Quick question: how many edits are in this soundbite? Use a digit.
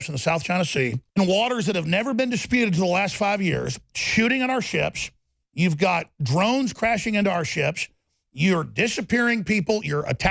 1